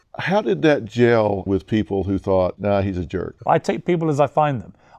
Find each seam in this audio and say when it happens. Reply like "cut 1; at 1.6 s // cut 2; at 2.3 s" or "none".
cut 1; at 1.5 s // cut 2; at 3.1 s